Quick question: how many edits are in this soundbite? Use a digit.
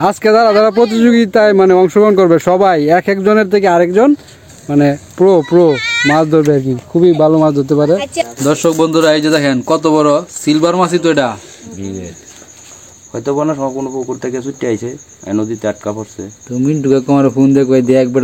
2